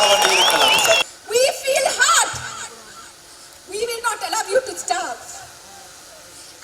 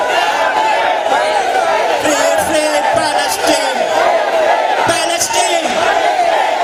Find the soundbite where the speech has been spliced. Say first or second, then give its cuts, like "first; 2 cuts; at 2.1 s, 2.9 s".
first; 1 cut; at 1.1 s